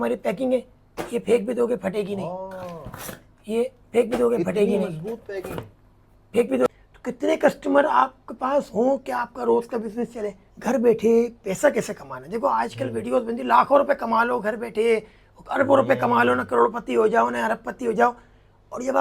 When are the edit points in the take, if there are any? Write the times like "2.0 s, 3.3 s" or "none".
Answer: 6.7 s, 10.5 s